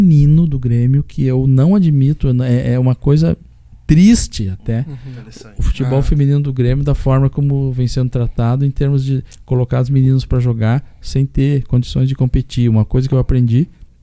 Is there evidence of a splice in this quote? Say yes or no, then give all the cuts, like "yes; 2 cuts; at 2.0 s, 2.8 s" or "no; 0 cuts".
no; 0 cuts